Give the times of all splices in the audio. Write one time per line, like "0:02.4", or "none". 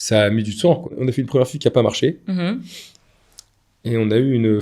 0:00.9